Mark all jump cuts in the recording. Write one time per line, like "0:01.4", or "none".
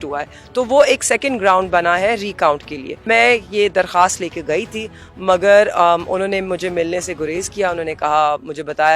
0:03.0